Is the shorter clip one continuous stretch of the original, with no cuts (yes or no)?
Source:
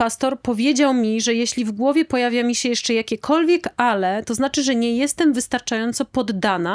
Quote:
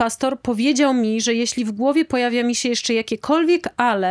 yes